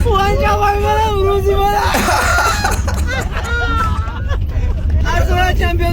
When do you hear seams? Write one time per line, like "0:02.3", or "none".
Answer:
0:05.0